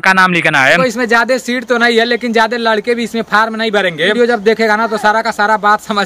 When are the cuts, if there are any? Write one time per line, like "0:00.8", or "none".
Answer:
0:00.8
0:04.1